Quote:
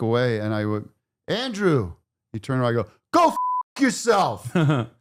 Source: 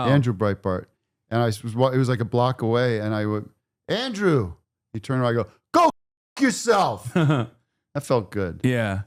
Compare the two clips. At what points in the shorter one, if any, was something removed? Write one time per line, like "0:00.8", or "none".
none